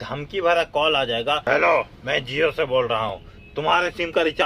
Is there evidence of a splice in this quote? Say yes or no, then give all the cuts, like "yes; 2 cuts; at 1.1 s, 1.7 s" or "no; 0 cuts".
yes; 2 cuts; at 1.4 s, 3.4 s